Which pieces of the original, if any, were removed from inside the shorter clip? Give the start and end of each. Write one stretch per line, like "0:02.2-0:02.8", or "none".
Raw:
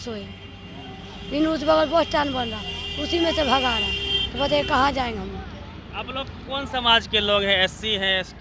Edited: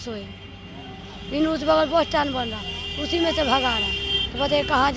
none